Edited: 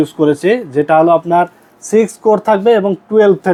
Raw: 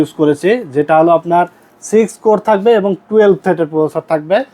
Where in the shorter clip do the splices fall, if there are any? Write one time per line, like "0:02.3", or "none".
none